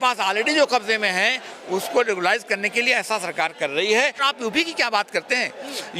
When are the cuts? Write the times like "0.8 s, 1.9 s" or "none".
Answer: 4.2 s